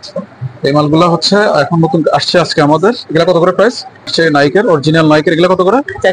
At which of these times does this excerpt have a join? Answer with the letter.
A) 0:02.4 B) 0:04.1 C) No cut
B